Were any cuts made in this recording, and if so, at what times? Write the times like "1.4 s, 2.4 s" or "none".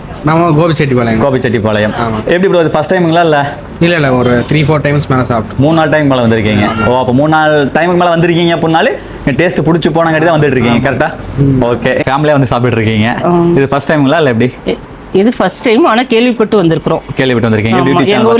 12.0 s